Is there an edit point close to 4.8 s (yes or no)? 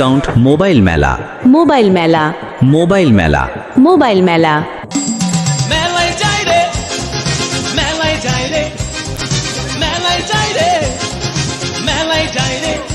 yes